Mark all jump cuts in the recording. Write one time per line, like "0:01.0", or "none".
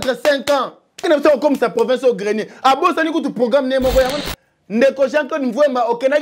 0:01.0
0:04.3